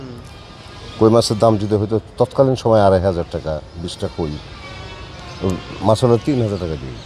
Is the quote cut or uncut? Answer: uncut